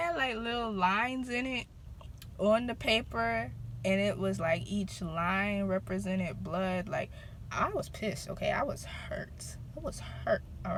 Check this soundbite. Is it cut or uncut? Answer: uncut